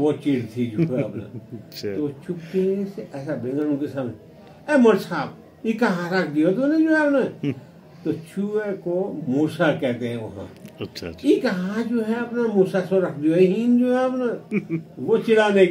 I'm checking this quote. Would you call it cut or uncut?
uncut